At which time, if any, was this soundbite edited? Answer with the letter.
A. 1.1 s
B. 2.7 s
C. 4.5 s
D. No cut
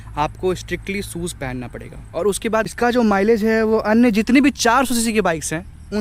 B